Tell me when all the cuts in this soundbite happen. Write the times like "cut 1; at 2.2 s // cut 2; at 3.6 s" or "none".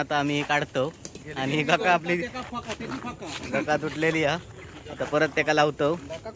none